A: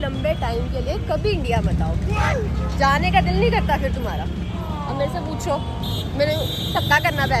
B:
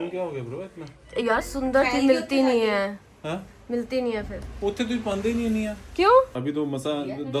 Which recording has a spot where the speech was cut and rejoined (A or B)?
B